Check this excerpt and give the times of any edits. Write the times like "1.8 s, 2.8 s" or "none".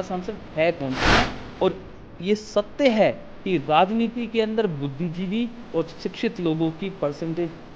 1.2 s